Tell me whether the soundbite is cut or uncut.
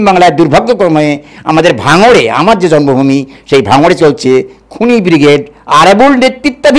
uncut